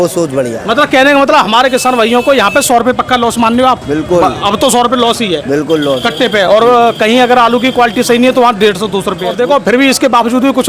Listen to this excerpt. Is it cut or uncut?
cut